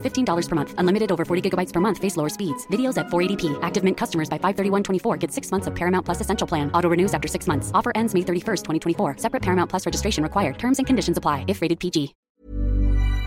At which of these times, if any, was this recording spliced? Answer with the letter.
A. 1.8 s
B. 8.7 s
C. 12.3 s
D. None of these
C